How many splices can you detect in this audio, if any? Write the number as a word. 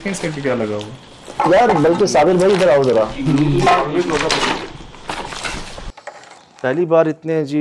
one